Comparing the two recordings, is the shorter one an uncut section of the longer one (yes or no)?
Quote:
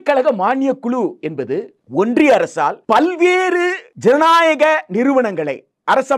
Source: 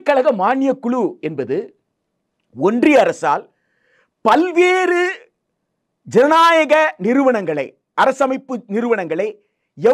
no